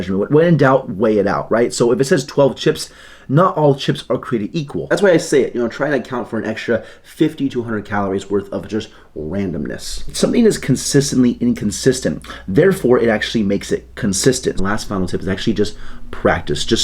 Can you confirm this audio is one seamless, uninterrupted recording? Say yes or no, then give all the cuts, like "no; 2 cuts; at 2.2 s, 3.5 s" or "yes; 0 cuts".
no; 3 cuts; at 4.8 s, 10.0 s, 14.6 s